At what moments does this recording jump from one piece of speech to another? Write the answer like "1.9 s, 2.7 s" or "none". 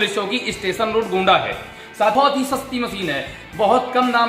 2.1 s